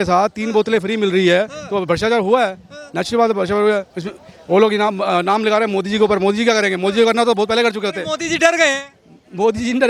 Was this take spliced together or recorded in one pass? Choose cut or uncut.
uncut